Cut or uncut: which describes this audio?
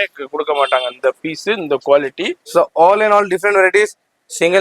cut